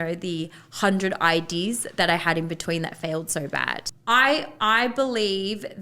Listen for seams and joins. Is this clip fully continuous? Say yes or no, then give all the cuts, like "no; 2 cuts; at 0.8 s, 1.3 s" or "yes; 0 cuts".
no; 1 cut; at 3.9 s